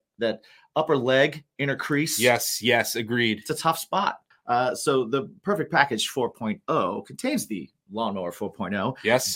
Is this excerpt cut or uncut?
cut